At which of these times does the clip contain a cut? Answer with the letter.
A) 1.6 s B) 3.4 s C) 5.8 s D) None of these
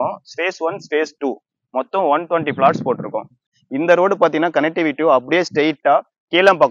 B